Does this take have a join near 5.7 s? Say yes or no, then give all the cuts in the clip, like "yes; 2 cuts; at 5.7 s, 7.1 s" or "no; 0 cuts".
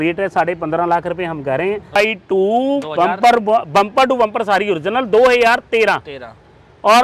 no; 1 cut; at 2.0 s